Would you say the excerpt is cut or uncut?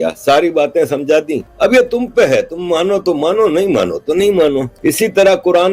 cut